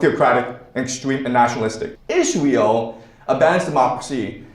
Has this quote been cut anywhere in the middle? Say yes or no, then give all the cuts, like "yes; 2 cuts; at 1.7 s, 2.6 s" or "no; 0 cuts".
yes; 1 cut; at 1.9 s